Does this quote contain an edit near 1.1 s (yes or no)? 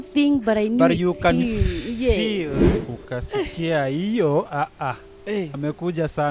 no